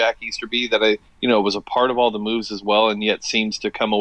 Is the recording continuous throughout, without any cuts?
yes; 0 cuts

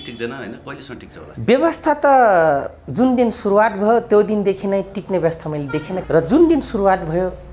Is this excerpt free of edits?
no; 2 cuts; at 1.3 s, 6.0 s

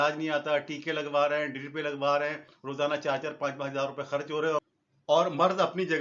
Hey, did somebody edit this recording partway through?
yes; 1 cut; at 2.5 s

